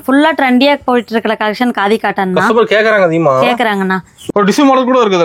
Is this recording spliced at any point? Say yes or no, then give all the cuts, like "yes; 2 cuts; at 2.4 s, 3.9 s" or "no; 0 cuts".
yes; 1 cut; at 4.1 s